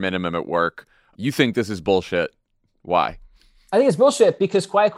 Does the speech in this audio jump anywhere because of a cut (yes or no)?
yes